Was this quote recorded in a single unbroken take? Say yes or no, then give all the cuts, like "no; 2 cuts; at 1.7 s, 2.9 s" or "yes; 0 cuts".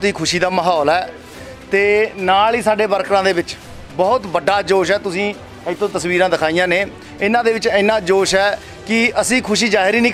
yes; 0 cuts